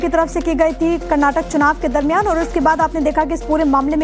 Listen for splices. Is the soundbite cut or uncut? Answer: cut